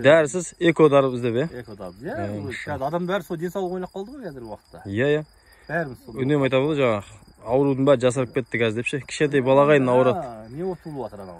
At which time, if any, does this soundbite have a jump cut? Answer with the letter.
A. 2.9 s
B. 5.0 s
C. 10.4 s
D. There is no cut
D